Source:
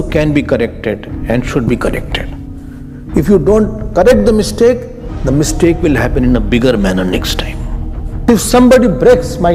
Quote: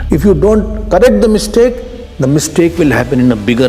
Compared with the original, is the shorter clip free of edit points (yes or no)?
yes